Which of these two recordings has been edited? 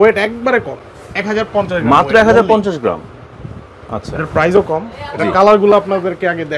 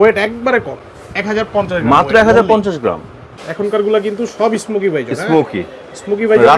second; 1 cut; at 3.4 s

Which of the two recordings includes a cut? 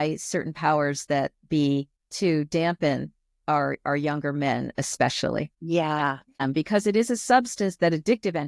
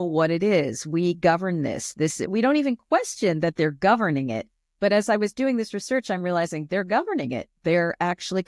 first; 3 cuts; at 2.0 s, 5.6 s, 6.4 s

